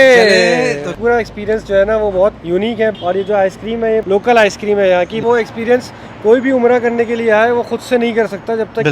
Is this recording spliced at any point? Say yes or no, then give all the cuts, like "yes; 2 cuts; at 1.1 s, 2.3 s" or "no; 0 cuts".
yes; 4 cuts; at 0.9 s, 2.7 s, 4.0 s, 5.2 s